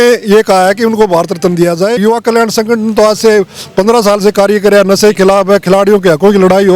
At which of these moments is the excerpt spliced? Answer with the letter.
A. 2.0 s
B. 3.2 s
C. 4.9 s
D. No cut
A